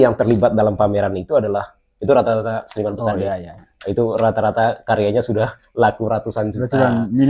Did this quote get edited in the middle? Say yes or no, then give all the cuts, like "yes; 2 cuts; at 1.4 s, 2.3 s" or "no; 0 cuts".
no; 0 cuts